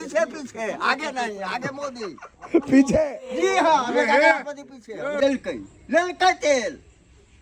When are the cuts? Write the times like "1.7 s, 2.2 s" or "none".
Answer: 5.2 s